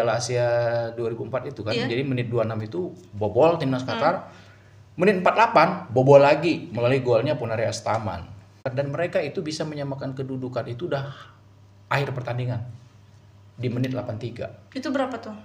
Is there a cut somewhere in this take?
yes; 1 cut; at 8.6 s

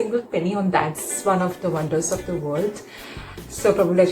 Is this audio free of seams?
no; 1 cut; at 1.1 s

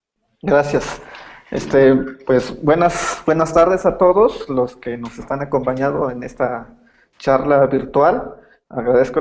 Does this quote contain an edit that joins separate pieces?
no; 0 cuts

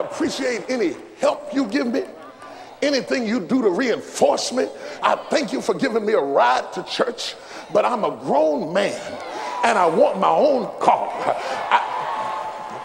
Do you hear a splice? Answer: no; 0 cuts

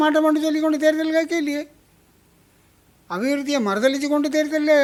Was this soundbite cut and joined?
no; 0 cuts

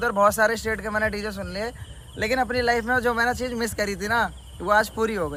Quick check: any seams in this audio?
no; 0 cuts

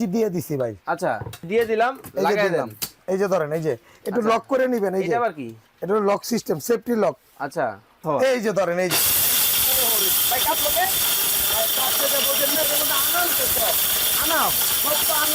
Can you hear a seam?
yes; 2 cuts; at 1.5 s, 8.0 s

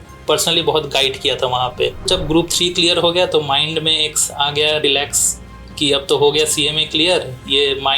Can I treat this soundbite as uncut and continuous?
no; 1 cut; at 2.1 s

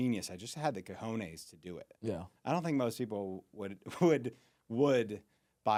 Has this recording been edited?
no; 0 cuts

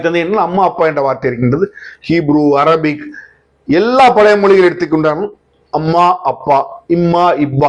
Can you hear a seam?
no; 0 cuts

